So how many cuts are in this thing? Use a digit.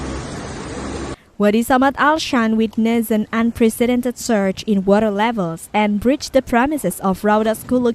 0